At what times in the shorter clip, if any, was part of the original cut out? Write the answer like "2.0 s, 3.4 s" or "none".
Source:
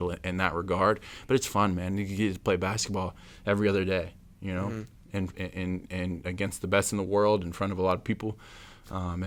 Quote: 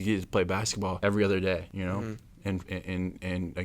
1.0 s, 1.7 s